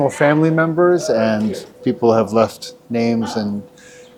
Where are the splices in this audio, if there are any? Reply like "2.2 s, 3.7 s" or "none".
none

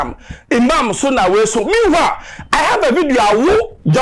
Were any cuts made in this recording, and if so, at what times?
none

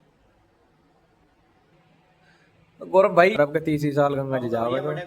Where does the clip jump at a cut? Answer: 3.3 s

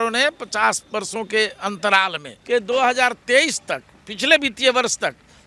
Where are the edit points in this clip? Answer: 2.3 s

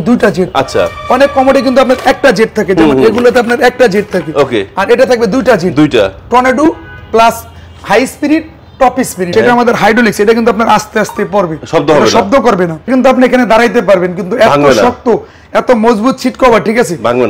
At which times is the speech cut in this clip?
9.3 s, 12.9 s

